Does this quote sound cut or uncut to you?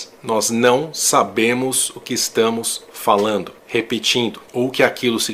cut